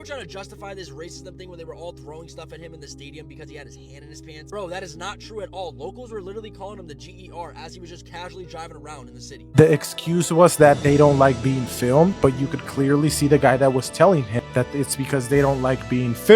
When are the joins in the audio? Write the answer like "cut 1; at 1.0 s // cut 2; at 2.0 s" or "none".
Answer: cut 1; at 9.5 s